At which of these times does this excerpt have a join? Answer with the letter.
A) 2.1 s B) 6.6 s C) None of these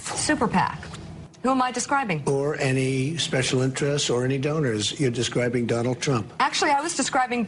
B